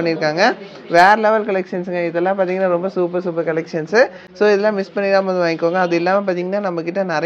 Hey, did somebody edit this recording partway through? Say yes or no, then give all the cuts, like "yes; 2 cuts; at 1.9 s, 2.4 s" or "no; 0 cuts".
no; 0 cuts